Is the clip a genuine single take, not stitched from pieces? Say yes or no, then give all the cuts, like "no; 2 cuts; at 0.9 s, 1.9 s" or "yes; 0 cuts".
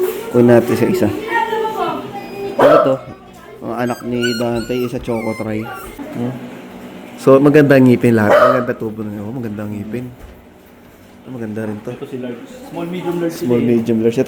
no; 1 cut; at 6.0 s